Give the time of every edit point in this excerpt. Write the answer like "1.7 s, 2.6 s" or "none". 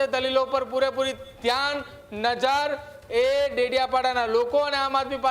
none

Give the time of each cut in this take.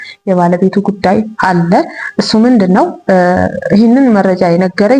none

